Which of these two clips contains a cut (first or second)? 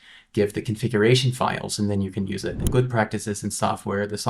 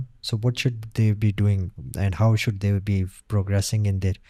first